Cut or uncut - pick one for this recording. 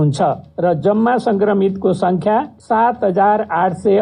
cut